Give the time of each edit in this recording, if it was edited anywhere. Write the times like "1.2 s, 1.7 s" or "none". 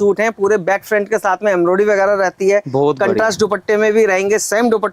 none